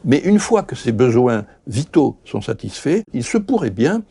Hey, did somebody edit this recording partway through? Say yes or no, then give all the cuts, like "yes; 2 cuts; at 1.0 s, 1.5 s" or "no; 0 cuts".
yes; 2 cuts; at 0.8 s, 3.2 s